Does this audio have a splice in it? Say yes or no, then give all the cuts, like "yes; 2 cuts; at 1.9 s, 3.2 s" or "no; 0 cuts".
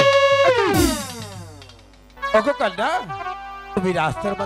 yes; 2 cuts; at 2.2 s, 3.8 s